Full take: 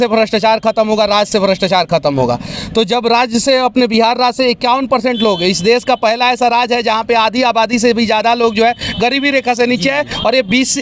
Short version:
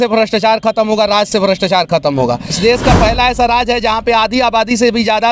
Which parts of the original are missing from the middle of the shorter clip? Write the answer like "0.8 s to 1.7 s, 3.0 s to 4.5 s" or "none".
2.6 s to 5.6 s